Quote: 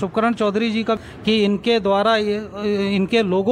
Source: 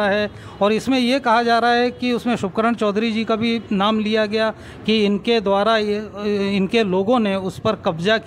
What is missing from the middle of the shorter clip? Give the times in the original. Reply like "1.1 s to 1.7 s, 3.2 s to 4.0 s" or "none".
3.4 s to 4.6 s